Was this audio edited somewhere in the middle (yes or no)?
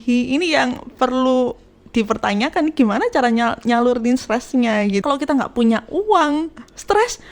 yes